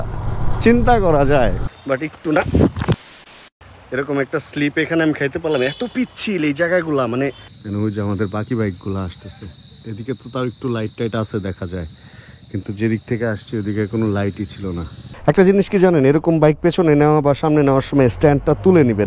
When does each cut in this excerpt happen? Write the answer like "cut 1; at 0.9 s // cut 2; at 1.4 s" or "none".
cut 1; at 1.7 s // cut 2; at 7.5 s // cut 3; at 15.1 s